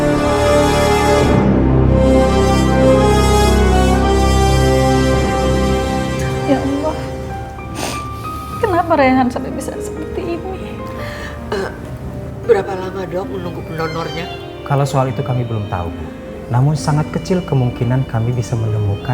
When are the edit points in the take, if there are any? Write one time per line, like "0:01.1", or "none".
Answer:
none

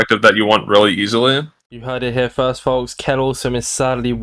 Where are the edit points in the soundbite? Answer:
0:01.5

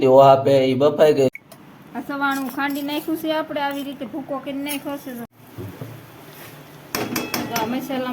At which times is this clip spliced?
0:01.3
0:05.3

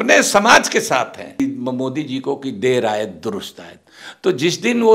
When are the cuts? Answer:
0:01.4

